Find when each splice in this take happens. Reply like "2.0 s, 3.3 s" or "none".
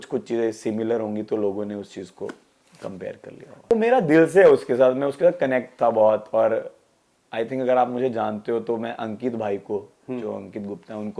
3.7 s

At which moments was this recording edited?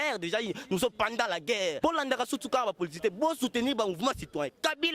1.8 s

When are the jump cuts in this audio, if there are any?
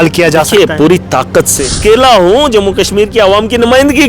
1.5 s

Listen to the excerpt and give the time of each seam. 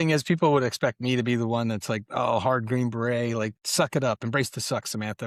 none

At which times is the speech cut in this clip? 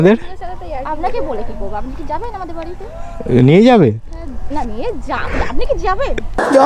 none

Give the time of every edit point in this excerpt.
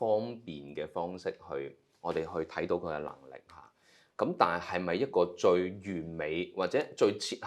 none

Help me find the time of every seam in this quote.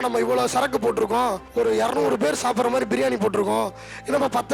1.4 s

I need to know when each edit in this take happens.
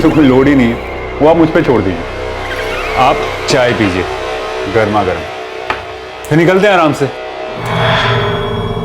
7.7 s

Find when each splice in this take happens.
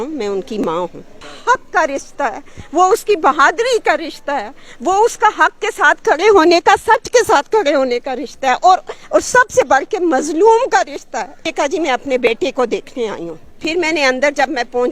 1.2 s, 11.4 s

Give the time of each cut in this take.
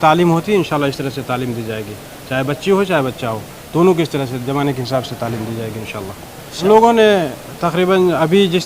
6.6 s

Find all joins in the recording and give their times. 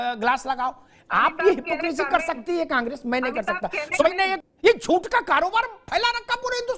4.5 s

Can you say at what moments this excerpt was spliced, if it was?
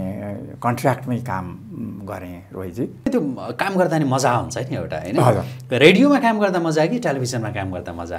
3.1 s

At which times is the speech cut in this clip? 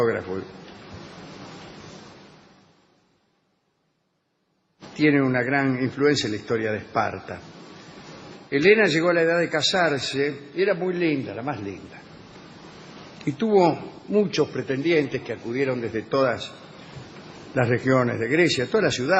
7.0 s

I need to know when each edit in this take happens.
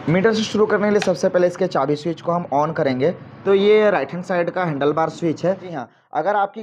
3.3 s, 5.7 s

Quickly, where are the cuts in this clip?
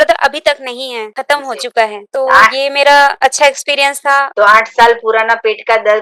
1.1 s, 2.0 s, 3.2 s, 4.3 s

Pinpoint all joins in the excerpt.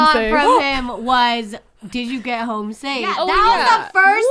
3.1 s

